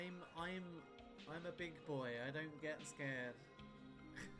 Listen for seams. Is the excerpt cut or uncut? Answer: uncut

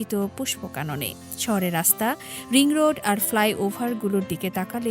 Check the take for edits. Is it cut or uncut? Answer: uncut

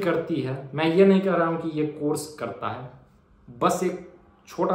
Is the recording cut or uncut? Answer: uncut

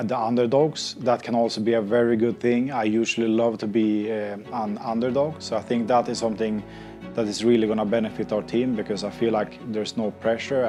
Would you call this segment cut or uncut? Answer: uncut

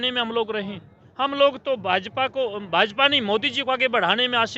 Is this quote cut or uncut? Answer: cut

